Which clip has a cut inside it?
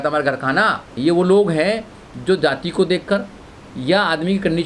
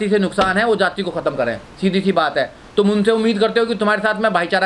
first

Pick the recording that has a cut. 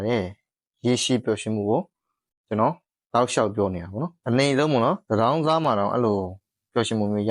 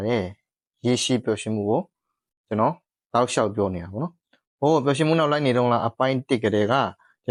first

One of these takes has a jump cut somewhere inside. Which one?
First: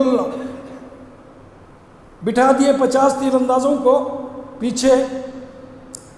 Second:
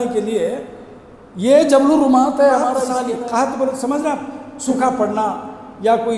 second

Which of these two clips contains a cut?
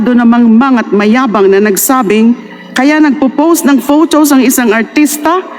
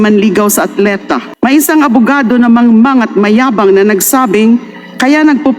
second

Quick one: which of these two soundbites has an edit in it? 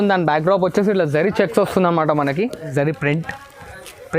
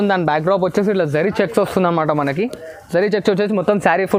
first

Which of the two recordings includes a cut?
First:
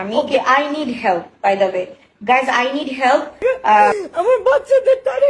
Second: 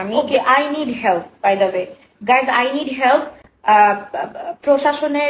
first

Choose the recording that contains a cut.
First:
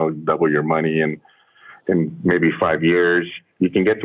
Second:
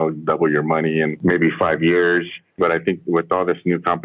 second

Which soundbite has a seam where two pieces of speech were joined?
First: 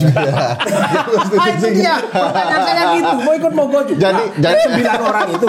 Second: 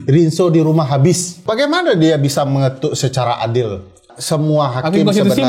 second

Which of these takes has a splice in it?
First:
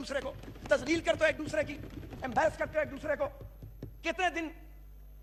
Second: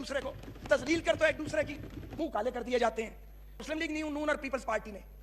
second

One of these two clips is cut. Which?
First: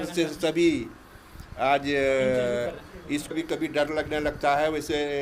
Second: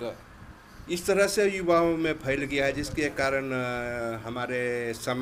first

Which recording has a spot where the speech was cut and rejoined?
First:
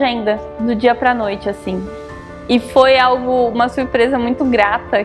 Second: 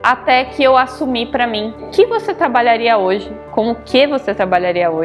second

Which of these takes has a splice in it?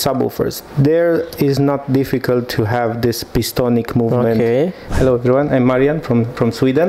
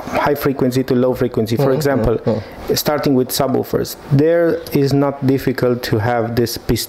first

